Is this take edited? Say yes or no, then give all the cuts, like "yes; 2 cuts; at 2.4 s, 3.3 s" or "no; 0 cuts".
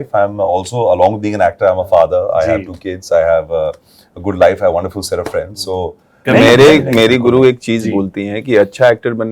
yes; 1 cut; at 6.2 s